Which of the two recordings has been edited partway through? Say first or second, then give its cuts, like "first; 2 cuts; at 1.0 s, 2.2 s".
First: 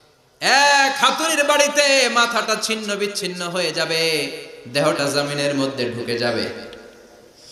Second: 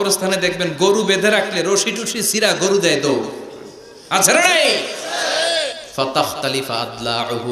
second; 1 cut; at 5.8 s